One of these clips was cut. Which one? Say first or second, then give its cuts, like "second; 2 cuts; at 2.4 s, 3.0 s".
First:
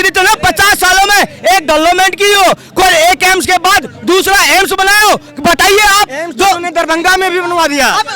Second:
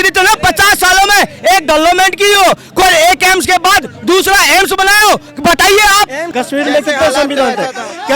second; 1 cut; at 6.2 s